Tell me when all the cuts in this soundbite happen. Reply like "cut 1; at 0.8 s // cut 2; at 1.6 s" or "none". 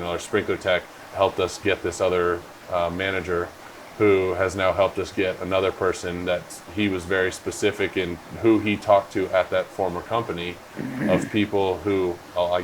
cut 1; at 1.0 s